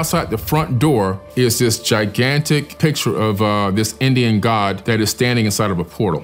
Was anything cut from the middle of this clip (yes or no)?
no